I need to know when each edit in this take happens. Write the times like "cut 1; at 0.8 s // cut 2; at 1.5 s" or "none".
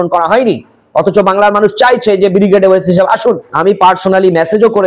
cut 1; at 3.5 s

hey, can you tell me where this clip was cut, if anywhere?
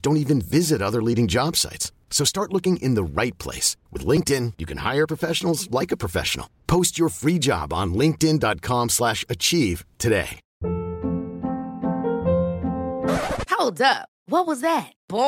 cut 1; at 10.4 s

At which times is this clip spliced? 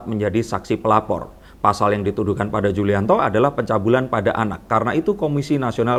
none

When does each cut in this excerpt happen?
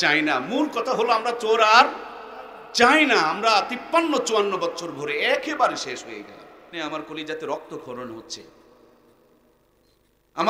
cut 1; at 6.7 s

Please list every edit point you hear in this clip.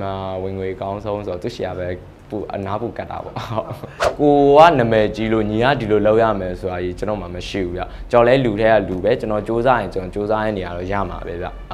cut 1; at 4.1 s

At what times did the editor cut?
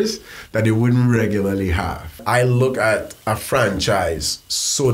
cut 1; at 2.2 s

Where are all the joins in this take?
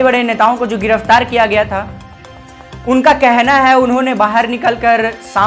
none

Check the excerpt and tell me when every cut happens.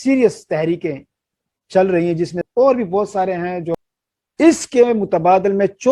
cut 1; at 2.4 s // cut 2; at 3.8 s

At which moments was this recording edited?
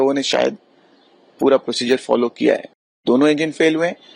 cut 1; at 2.9 s

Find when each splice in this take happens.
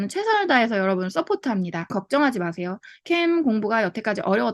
cut 1; at 1.9 s

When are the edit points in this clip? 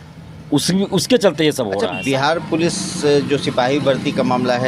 cut 1; at 1.9 s

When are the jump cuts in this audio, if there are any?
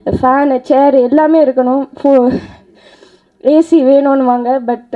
none

